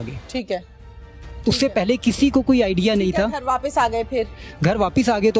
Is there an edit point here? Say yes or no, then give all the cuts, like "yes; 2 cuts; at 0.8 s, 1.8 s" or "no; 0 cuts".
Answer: no; 0 cuts